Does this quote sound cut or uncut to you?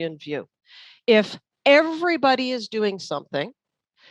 uncut